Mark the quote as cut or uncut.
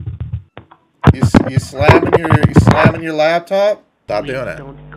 cut